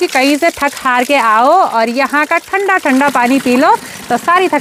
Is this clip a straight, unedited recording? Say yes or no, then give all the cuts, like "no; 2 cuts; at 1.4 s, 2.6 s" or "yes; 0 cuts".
yes; 0 cuts